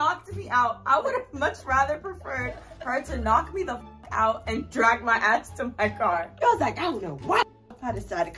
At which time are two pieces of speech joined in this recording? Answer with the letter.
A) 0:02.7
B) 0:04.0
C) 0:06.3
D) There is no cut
C